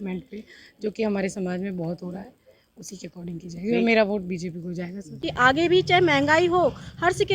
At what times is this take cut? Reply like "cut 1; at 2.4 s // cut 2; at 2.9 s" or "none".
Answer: cut 1; at 5.2 s